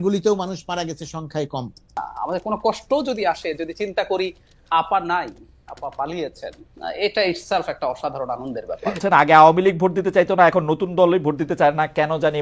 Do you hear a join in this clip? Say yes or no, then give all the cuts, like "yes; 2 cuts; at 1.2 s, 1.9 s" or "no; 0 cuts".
yes; 2 cuts; at 2.1 s, 9.0 s